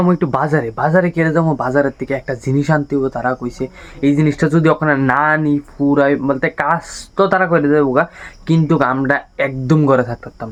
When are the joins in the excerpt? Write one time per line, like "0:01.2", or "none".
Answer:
none